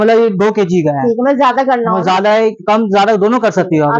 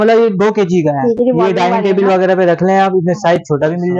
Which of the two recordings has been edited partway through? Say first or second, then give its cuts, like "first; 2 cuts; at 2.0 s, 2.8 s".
second; 1 cut; at 1.2 s